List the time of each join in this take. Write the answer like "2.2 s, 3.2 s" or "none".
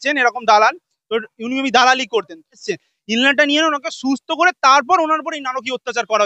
2.6 s